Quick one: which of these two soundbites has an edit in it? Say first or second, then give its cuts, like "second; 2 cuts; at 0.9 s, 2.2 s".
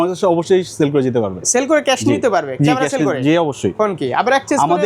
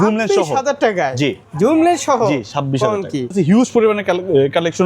second; 2 cuts; at 1.4 s, 3.3 s